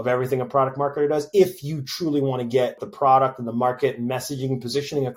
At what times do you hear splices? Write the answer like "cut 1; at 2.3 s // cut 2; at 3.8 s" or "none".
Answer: cut 1; at 2.8 s